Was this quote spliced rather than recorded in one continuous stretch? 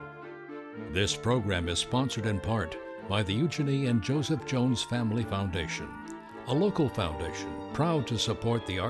no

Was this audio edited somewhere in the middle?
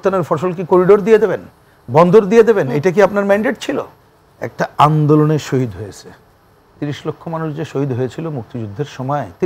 yes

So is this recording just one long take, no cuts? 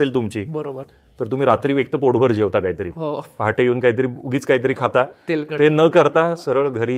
yes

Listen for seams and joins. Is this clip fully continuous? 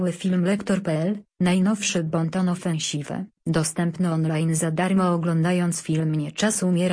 no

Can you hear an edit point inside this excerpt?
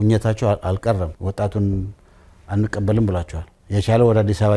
yes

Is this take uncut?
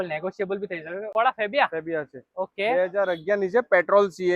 no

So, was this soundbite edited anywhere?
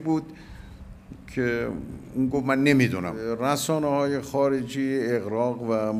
yes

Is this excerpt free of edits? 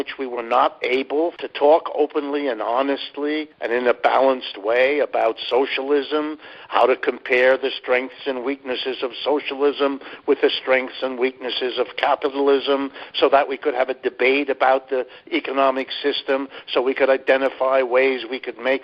no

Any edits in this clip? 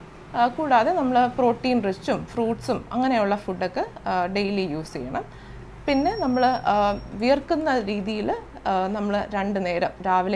no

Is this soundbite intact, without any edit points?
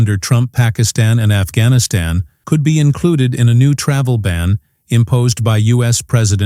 yes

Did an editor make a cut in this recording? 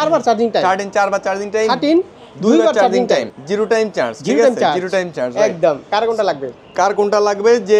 no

